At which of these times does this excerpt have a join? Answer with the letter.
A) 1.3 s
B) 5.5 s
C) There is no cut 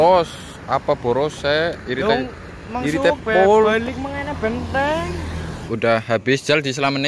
B